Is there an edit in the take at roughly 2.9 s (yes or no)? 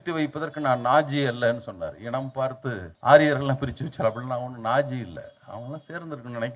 yes